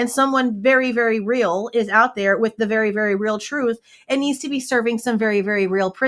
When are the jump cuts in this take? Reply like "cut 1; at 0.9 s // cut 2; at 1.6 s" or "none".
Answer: none